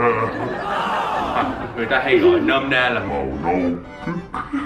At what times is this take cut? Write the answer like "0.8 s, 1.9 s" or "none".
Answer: 1.3 s